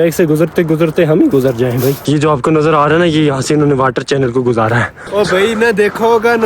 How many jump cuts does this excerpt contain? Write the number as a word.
two